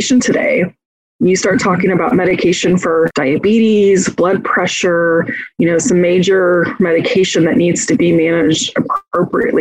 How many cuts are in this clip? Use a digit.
1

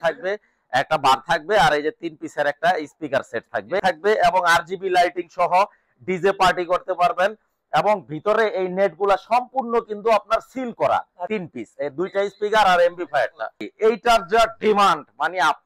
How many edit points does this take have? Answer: 3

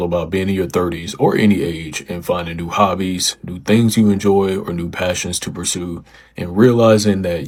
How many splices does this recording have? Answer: 0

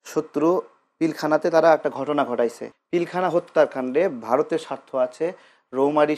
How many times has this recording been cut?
1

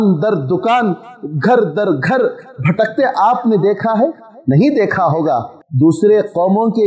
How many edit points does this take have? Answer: 1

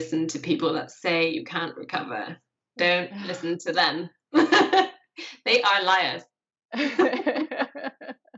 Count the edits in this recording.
0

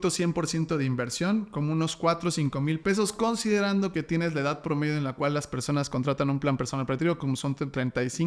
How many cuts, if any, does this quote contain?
0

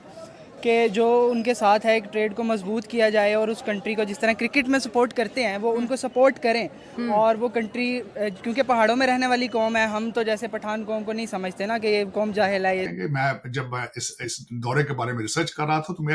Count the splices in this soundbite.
1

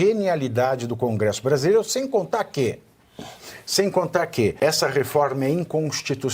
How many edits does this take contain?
1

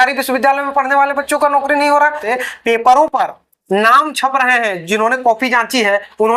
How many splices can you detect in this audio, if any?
1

